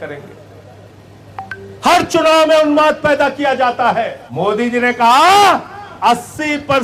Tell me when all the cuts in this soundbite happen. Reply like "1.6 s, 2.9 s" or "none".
4.2 s